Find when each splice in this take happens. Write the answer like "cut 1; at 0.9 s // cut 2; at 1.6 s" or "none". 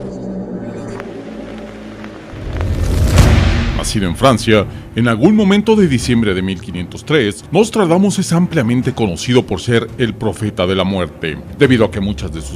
cut 1; at 7.0 s